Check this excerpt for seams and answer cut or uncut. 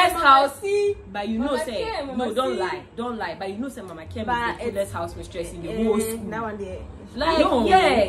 uncut